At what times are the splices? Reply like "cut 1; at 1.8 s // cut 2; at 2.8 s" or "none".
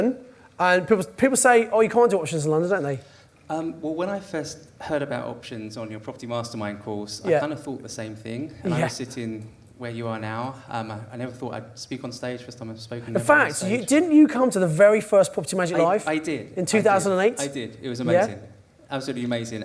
none